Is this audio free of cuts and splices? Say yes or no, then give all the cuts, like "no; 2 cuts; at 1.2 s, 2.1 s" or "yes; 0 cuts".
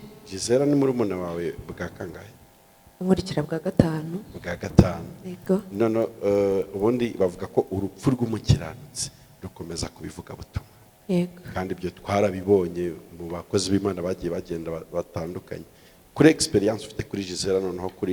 yes; 0 cuts